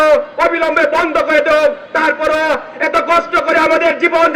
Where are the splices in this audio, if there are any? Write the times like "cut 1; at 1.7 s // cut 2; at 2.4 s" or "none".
none